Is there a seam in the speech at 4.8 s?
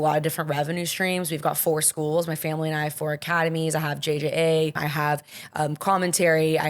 yes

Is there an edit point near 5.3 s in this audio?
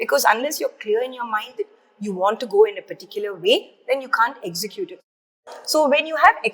yes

